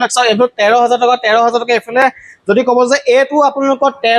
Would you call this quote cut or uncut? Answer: uncut